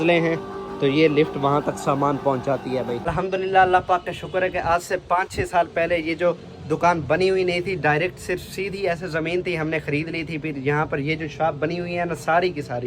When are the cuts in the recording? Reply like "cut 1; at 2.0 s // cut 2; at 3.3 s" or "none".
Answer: cut 1; at 3.0 s